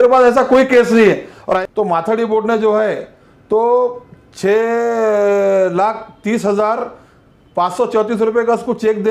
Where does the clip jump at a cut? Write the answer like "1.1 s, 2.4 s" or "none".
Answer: 1.5 s

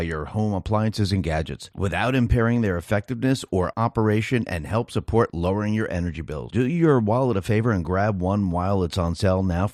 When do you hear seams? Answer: none

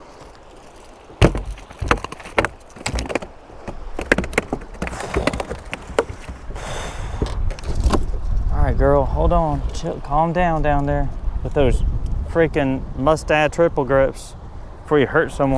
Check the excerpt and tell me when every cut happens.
none

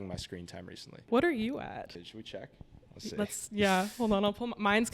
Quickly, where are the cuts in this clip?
1.0 s, 2.0 s

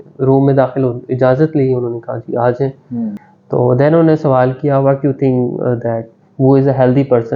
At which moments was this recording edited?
3.2 s

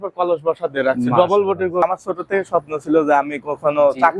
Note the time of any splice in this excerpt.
1.8 s

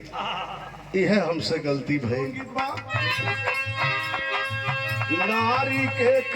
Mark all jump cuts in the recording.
2.4 s

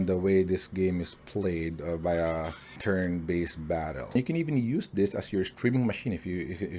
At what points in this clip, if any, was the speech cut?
2.6 s, 4.2 s

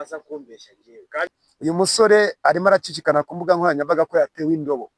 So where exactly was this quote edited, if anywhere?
1.4 s

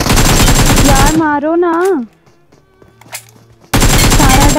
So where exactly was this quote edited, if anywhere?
none

